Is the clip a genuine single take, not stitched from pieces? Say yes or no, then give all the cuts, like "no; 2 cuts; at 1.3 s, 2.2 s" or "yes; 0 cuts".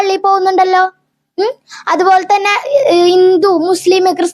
yes; 0 cuts